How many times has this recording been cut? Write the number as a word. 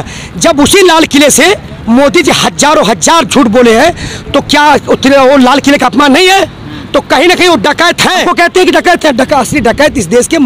one